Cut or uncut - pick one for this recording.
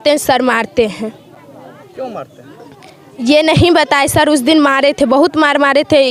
uncut